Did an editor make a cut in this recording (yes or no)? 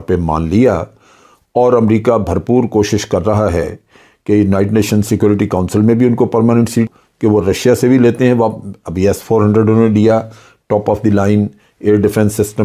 yes